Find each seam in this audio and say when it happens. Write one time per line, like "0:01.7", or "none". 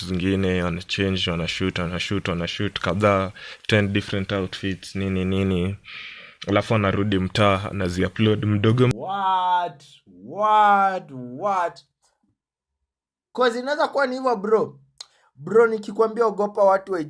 none